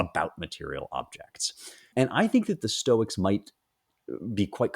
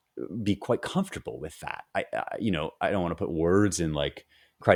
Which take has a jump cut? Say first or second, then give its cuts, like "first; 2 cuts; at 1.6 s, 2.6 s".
first; 1 cut; at 1.9 s